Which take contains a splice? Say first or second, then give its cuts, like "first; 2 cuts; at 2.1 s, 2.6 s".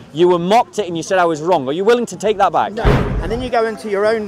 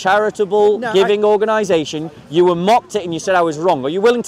first; 1 cut; at 3.0 s